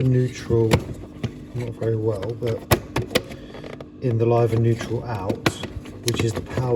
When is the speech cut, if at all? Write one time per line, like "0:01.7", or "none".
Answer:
none